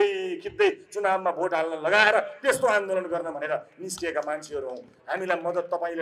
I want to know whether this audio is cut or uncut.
uncut